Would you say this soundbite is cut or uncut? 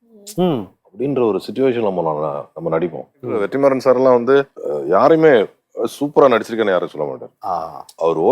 cut